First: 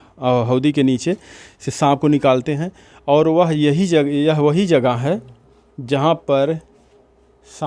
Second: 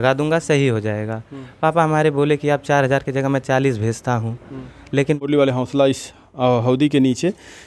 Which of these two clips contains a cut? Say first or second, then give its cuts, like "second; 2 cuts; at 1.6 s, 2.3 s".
second; 1 cut; at 5.2 s